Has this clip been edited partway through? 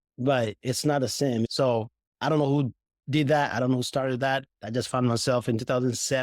yes; 1 cut; at 1.5 s

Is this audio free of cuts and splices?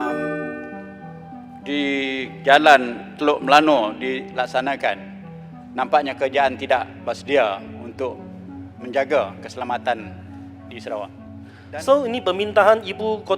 no; 1 cut; at 11.5 s

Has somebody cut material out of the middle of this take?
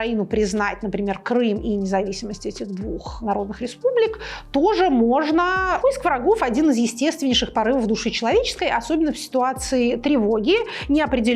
yes; 2 cuts; at 3.1 s, 5.8 s

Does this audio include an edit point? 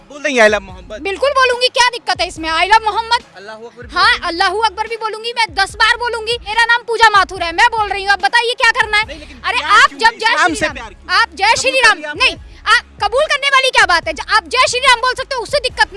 yes; 1 cut; at 6.4 s

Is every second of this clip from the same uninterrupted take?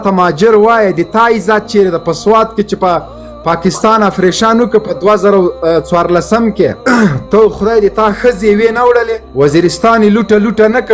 yes; 0 cuts

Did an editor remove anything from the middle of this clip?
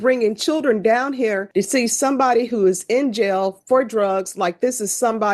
yes; 1 cut; at 1.4 s

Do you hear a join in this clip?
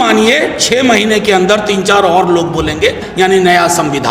yes; 1 cut; at 3.0 s

